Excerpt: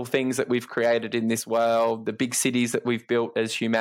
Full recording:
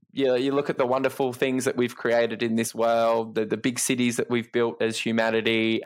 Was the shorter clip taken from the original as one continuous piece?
no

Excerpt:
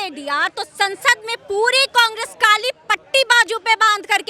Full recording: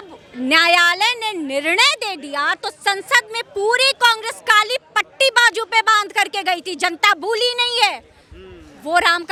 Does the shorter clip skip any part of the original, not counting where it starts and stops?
no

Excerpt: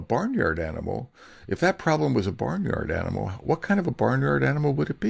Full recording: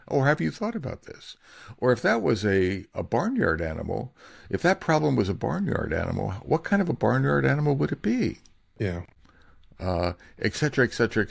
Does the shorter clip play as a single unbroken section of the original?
yes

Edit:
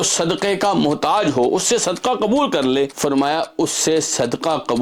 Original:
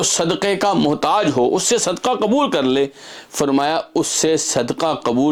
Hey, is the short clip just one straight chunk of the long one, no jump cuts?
no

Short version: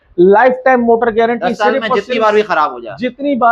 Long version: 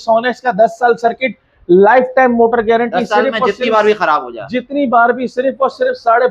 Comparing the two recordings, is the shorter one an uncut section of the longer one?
yes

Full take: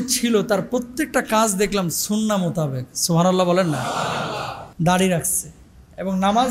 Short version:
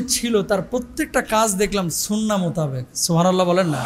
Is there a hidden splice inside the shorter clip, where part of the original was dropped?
no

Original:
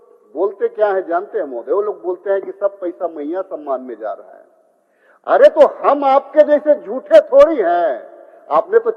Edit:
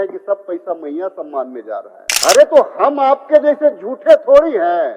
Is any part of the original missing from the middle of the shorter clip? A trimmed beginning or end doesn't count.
yes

